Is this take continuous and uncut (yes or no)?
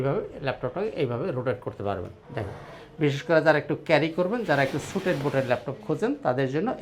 yes